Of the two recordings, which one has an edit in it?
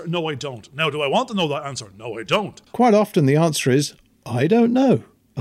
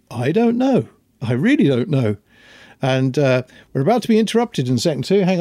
first; 1 cut; at 2.6 s

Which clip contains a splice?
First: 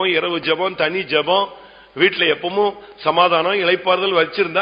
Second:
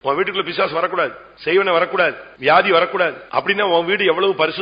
second; 3 cuts; at 1.3 s, 2.3 s, 3.2 s

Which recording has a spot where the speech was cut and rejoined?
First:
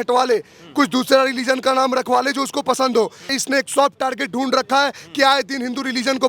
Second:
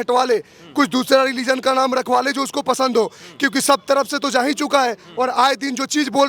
first; 1 cut; at 3.3 s

